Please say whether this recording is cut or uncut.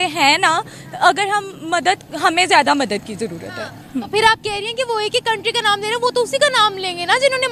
uncut